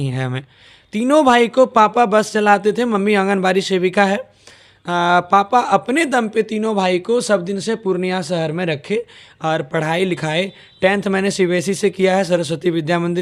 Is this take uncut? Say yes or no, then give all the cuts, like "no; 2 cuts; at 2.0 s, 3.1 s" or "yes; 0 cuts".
yes; 0 cuts